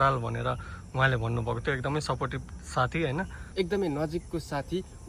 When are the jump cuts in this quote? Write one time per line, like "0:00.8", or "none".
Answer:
0:03.4